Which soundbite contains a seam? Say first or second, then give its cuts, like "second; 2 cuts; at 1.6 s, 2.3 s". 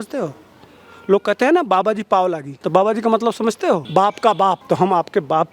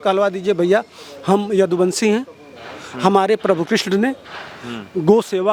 first; 3 cuts; at 2.5 s, 3.8 s, 4.6 s